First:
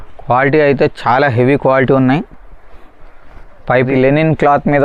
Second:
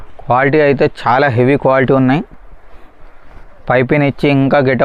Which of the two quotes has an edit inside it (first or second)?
first